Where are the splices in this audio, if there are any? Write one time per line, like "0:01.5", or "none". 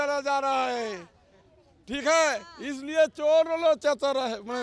none